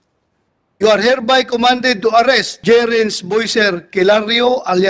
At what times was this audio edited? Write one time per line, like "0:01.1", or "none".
0:02.5